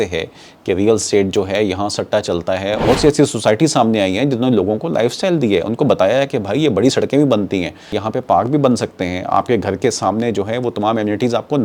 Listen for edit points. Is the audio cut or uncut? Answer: cut